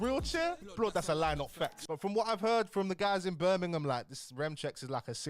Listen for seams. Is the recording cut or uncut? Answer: cut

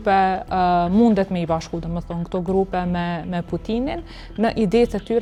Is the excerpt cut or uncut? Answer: uncut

